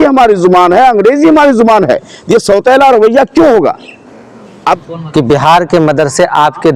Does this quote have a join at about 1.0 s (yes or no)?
no